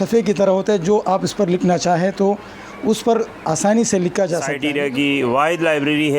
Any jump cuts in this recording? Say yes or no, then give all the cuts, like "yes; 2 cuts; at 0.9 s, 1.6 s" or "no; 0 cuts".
yes; 1 cut; at 4.6 s